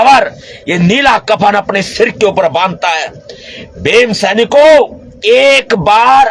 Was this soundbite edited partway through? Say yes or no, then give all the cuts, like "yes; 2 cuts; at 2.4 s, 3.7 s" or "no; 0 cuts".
yes; 1 cut; at 5.1 s